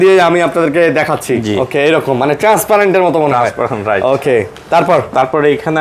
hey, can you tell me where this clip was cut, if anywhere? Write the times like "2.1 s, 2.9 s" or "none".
none